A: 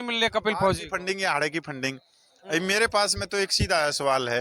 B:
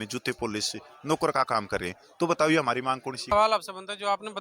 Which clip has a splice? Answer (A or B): B